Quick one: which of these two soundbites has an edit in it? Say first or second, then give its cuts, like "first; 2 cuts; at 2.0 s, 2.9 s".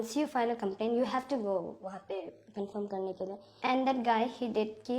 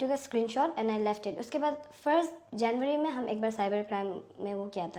first; 1 cut; at 3.5 s